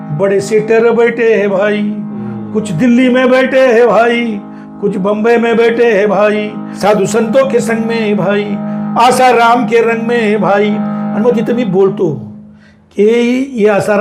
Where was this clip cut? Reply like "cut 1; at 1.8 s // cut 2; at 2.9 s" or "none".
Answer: cut 1; at 6.6 s